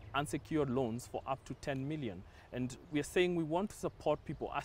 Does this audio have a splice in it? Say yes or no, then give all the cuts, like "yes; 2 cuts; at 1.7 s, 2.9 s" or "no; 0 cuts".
no; 0 cuts